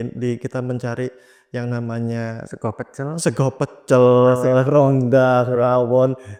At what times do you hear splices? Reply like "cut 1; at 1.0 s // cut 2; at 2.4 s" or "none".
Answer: none

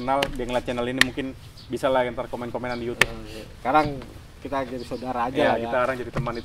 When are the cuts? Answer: none

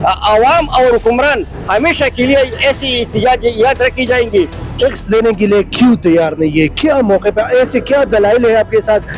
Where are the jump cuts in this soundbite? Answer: none

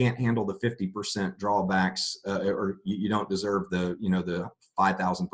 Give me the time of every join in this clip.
none

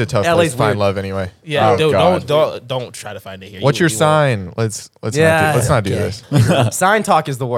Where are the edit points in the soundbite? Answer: none

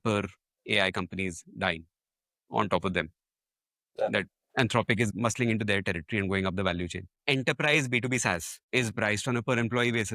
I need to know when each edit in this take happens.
cut 1; at 5.1 s // cut 2; at 7.1 s // cut 3; at 8.5 s

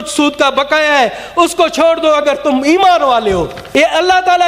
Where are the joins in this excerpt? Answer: cut 1; at 3.6 s

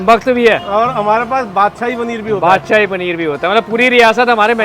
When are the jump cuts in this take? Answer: none

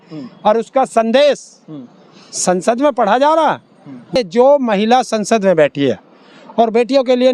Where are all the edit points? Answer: cut 1; at 4.2 s

